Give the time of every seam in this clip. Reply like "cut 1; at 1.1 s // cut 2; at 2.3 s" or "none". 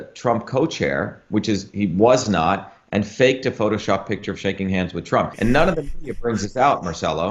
cut 1; at 5.3 s